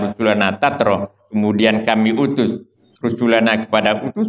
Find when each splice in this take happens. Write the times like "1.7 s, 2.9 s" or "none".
none